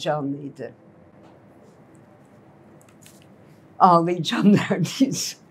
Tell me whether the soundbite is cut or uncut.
uncut